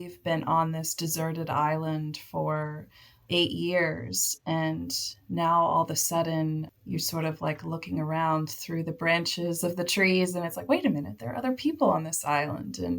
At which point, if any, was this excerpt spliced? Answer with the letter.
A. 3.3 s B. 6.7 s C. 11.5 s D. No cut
A